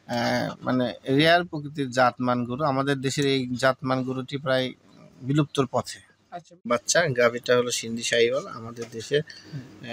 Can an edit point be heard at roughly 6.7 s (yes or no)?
yes